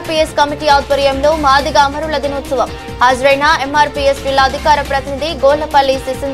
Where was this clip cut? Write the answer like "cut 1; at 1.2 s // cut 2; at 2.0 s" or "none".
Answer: none